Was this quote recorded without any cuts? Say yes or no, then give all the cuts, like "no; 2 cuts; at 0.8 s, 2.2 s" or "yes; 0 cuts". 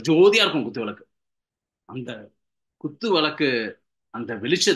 yes; 0 cuts